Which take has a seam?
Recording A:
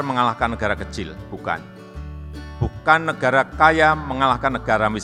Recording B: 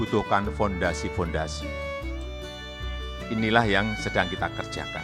B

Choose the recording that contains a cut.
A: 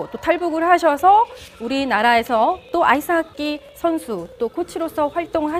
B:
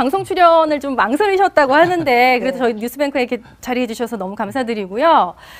B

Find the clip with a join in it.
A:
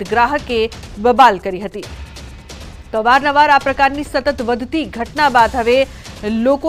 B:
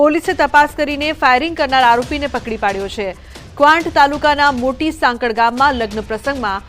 B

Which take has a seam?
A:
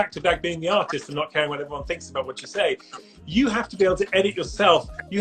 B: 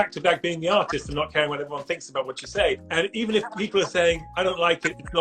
B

